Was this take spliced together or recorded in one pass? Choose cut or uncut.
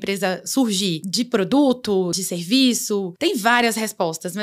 cut